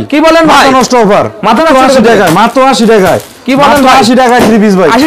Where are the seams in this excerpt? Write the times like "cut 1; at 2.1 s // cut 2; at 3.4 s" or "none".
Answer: cut 1; at 1.6 s